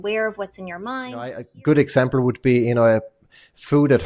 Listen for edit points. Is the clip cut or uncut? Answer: cut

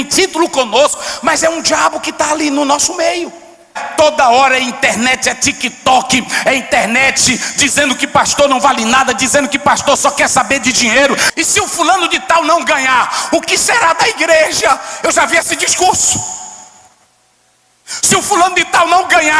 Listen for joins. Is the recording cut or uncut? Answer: cut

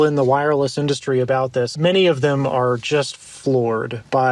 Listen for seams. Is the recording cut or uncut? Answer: cut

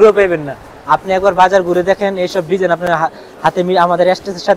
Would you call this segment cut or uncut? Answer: uncut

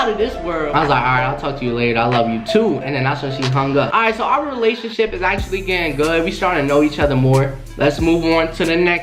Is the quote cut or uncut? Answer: uncut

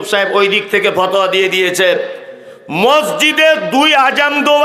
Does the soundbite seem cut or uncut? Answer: uncut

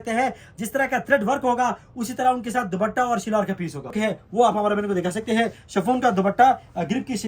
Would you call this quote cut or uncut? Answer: cut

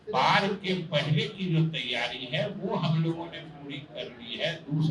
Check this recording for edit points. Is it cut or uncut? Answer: uncut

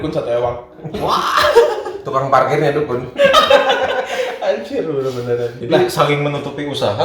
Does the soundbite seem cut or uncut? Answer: cut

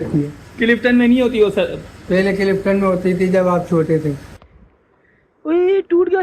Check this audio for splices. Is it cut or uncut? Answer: cut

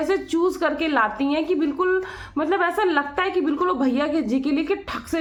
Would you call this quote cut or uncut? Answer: uncut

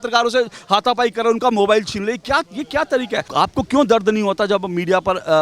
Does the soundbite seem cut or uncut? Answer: cut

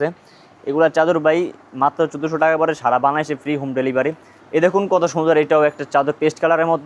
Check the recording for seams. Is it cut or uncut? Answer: cut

